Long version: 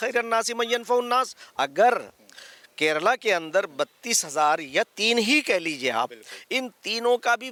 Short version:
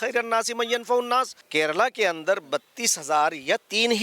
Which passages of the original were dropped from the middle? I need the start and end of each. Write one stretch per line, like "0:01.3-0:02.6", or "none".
0:01.4-0:02.6

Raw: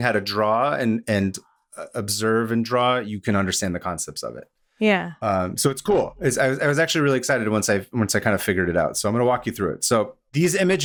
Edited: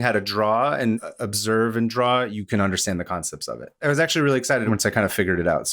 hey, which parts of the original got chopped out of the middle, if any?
0:01.0-0:01.8
0:04.5-0:06.6
0:07.4-0:07.9

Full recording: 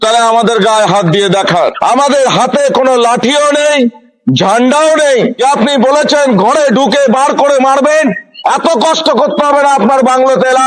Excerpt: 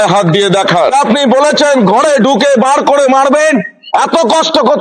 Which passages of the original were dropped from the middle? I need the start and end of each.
0:01.7-0:05.4

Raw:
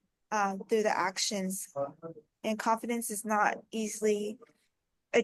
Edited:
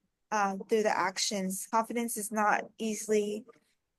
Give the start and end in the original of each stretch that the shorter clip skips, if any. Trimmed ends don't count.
0:01.7-0:02.6

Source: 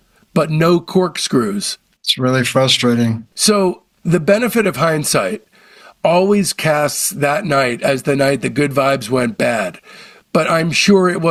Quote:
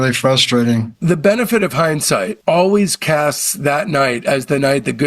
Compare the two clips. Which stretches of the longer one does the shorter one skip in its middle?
0:03.2-0:04.0
0:05.4-0:05.9

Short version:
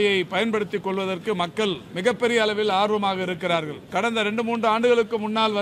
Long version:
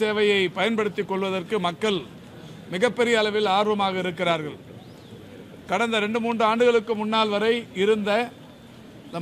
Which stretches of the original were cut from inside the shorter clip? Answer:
0:02.1-0:02.6
0:04.5-0:05.5

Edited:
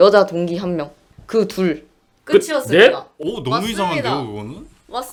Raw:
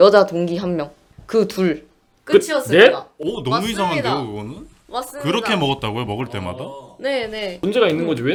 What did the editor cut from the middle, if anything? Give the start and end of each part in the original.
none

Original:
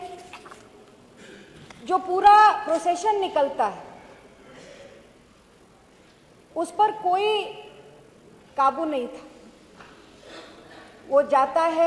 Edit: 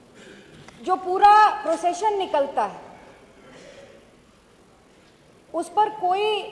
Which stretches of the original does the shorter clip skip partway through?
none

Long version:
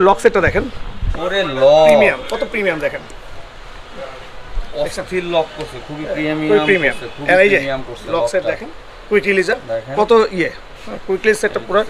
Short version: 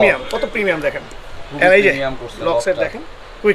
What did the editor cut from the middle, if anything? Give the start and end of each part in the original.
0:03.4-0:07.1

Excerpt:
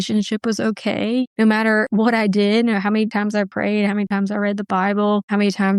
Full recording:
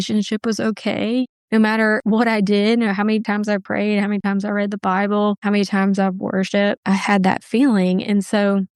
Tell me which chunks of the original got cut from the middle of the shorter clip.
0:01.3-0:01.4

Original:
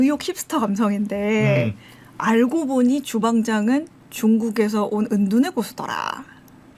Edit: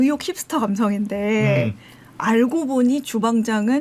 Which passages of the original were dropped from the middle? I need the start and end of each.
none

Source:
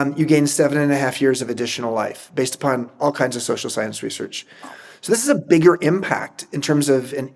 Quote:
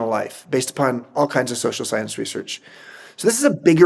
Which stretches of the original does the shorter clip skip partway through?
none

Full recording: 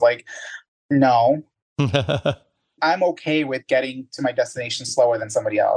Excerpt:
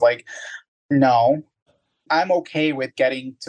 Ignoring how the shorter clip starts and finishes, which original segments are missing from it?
0:01.7-0:02.4

